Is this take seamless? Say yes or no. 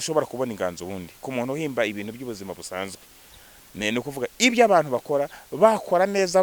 yes